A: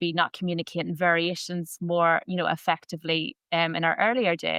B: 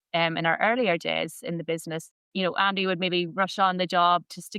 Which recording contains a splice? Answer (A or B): B